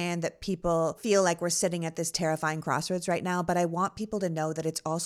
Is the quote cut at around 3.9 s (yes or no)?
no